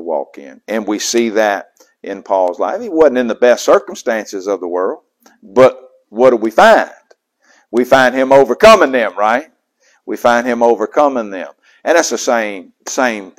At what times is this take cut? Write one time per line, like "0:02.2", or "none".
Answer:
none